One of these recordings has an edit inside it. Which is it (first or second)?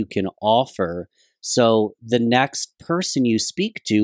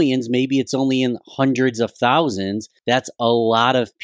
second